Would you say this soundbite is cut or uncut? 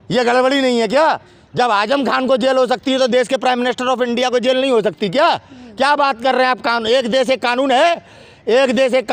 uncut